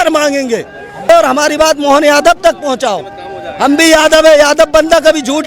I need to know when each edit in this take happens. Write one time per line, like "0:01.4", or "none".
0:01.0